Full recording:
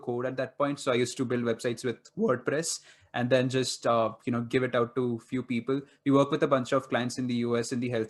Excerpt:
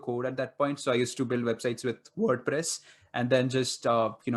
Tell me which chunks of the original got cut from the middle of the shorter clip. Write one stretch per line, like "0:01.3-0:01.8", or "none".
none